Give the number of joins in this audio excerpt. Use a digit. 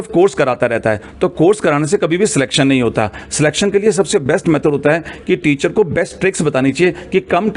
0